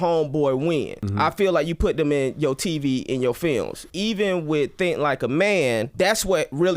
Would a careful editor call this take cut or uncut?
cut